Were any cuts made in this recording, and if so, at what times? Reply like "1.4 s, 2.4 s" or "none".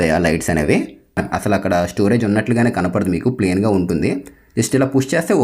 1.2 s